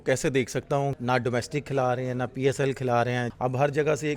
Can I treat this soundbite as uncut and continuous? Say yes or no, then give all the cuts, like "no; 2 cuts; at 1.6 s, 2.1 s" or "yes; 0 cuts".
no; 2 cuts; at 0.9 s, 3.3 s